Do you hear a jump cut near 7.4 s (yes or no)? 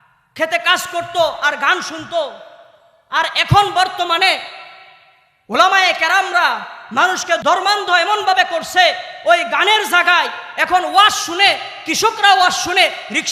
yes